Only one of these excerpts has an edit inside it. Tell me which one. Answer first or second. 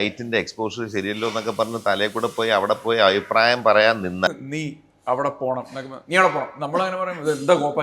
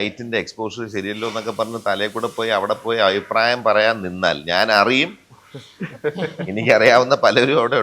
first